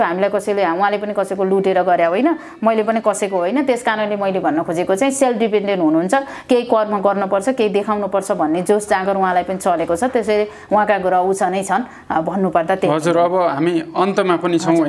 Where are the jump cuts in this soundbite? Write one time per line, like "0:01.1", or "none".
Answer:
none